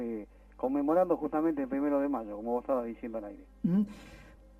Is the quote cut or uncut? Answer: cut